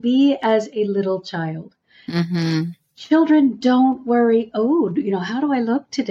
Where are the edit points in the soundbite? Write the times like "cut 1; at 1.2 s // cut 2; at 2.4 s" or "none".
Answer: none